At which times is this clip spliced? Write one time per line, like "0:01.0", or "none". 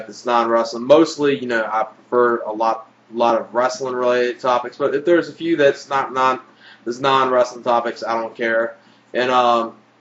0:03.4